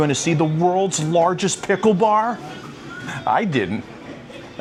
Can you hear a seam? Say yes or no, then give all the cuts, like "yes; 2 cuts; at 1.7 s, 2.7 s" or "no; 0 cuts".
no; 0 cuts